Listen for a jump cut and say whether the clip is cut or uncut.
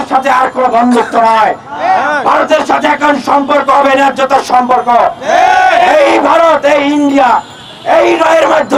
uncut